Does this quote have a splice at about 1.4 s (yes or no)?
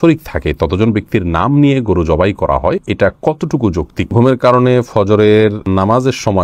no